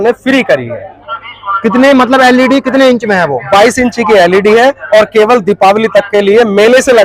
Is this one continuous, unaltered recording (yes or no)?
yes